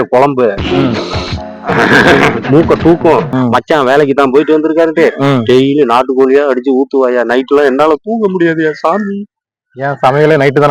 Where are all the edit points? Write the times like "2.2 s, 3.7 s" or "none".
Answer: 3.3 s